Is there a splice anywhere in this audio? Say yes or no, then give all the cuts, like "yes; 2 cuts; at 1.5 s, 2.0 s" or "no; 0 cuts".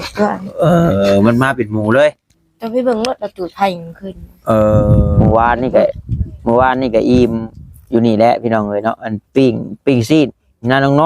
yes; 1 cut; at 5.0 s